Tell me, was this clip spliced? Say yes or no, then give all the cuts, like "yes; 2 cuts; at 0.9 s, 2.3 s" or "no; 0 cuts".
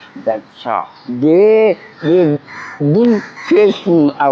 yes; 3 cuts; at 1.0 s, 1.9 s, 3.3 s